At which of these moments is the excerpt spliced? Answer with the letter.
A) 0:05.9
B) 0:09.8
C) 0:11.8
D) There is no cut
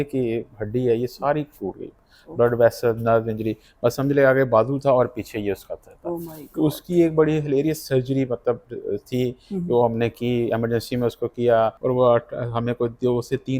C